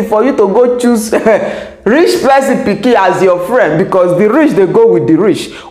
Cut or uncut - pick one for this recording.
uncut